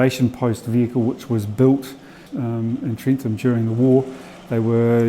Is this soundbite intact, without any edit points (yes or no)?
no